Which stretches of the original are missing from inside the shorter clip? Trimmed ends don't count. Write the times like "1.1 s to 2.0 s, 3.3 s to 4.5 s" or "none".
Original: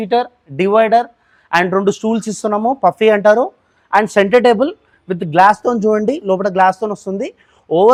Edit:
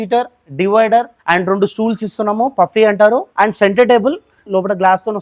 1.2 s to 1.4 s, 3.5 s to 3.8 s, 5.0 s to 6.2 s